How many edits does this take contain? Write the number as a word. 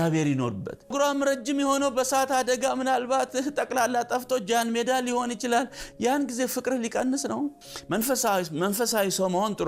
two